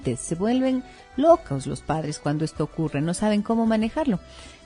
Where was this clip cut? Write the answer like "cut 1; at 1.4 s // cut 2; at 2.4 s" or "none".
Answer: cut 1; at 2.5 s